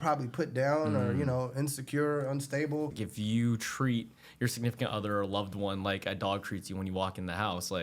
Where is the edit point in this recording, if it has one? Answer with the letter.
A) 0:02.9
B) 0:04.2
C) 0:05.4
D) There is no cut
A